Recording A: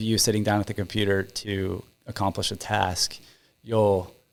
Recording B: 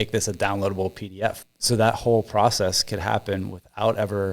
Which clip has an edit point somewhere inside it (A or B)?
B